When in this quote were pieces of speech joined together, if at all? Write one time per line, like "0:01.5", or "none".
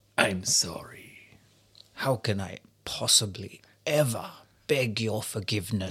none